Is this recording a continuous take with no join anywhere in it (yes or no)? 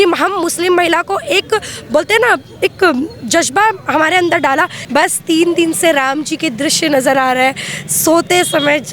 no